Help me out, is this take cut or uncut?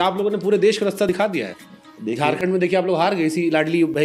uncut